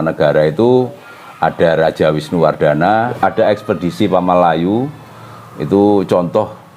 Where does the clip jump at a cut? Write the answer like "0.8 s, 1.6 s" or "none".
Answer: 3.1 s